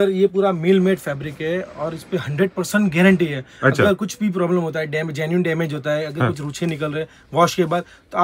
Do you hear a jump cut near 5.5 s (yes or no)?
no